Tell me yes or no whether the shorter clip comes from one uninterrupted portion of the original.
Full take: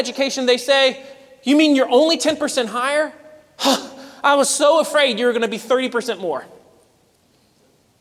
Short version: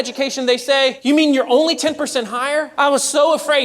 no